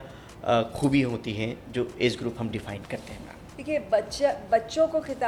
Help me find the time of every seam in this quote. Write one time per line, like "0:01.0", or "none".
none